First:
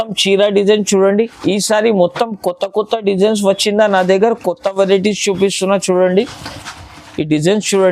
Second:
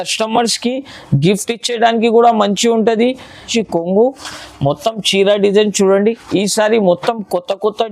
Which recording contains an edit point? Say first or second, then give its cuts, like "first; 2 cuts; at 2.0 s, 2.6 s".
second; 1 cut; at 3.4 s